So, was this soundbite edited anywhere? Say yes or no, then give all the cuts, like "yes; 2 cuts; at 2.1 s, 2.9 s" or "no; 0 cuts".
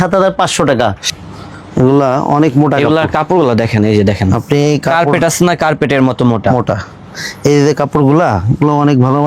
yes; 1 cut; at 1.0 s